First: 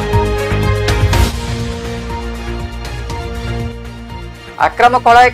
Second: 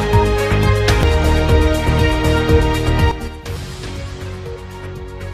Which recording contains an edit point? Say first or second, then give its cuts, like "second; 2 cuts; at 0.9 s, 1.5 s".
first; 1 cut; at 1.0 s